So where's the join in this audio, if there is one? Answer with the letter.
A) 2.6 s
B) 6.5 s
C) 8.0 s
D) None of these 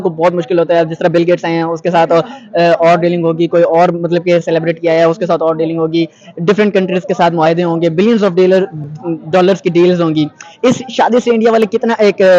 D